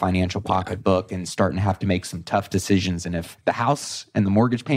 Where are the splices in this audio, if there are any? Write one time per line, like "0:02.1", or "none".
0:03.3